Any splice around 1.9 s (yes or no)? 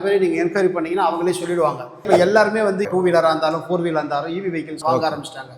yes